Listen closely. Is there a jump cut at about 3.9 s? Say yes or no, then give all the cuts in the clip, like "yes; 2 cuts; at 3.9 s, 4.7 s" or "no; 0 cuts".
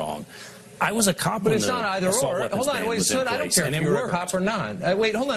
no; 1 cut; at 2.6 s